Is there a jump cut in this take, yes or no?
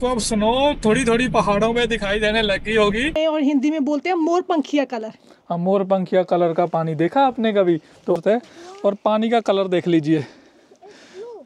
yes